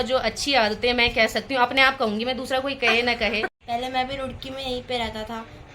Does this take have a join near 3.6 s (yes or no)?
yes